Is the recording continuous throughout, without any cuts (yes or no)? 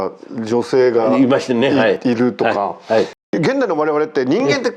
no